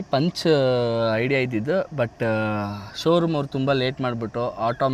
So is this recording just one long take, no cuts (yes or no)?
yes